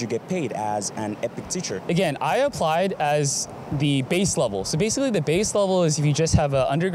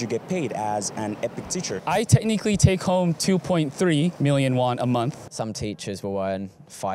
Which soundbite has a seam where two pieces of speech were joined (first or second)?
second